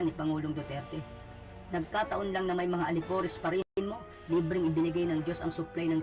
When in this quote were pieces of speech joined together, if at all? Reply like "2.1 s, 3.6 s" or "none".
3.7 s